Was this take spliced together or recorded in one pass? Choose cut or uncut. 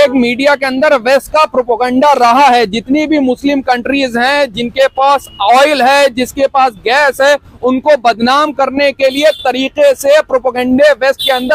uncut